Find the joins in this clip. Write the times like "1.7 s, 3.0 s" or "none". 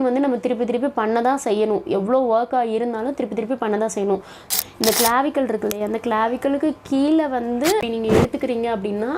4.5 s, 7.9 s